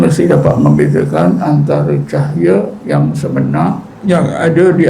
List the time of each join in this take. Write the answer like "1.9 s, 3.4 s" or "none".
2.8 s, 3.9 s